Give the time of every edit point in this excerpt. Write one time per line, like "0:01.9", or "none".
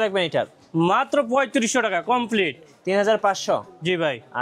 none